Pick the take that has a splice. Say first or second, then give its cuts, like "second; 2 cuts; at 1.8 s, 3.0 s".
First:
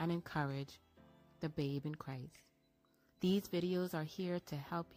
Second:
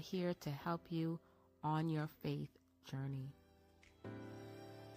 second; 1 cut; at 4.0 s